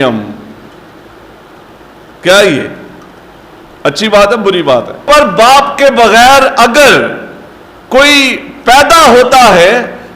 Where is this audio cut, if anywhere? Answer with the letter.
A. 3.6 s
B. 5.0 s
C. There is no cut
B